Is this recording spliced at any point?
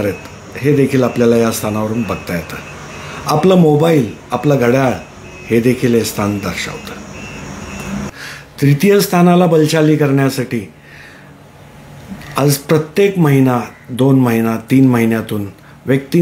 no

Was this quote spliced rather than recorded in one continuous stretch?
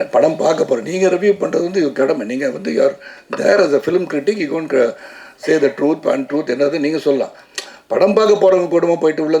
no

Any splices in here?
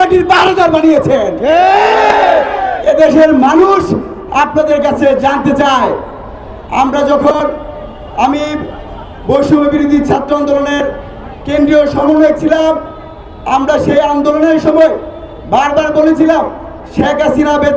no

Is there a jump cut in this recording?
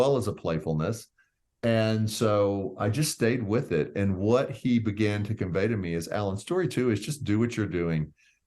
no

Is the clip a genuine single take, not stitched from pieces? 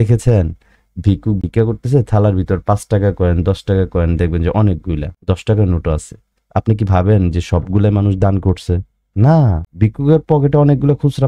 no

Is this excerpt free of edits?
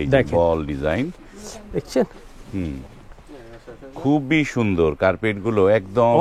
yes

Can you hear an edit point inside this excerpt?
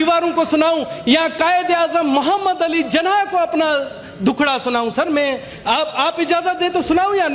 no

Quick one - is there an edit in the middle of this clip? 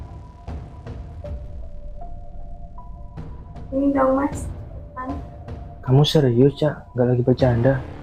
yes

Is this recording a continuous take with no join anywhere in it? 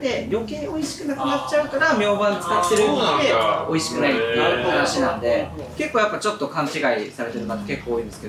yes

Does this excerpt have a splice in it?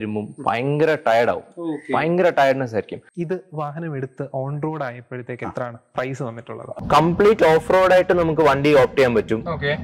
yes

